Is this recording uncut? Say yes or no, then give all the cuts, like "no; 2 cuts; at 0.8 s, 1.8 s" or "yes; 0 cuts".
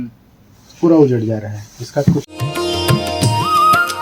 no; 1 cut; at 2.6 s